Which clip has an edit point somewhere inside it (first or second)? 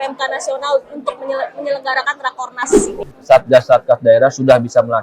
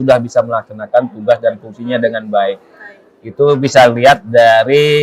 first